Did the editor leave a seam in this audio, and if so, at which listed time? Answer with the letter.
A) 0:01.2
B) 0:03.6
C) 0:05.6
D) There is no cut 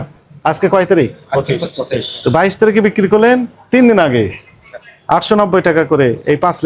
D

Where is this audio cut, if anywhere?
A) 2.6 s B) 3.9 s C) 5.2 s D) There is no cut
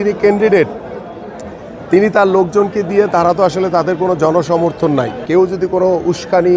C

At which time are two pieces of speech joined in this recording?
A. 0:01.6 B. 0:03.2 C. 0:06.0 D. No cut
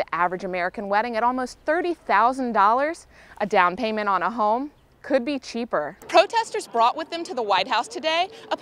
C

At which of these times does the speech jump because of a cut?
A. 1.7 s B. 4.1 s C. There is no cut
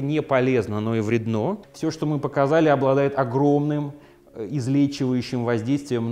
A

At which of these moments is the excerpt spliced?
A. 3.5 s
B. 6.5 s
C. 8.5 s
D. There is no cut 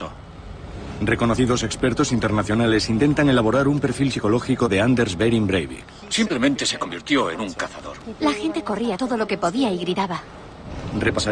D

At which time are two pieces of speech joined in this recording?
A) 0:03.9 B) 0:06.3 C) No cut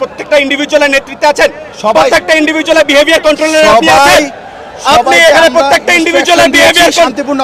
C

